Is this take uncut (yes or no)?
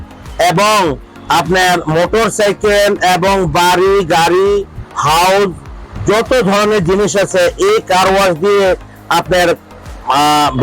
yes